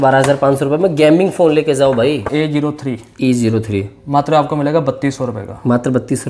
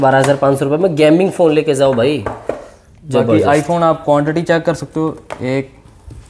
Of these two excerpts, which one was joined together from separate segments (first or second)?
first